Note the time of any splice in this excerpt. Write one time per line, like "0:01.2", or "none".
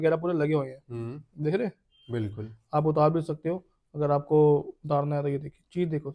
none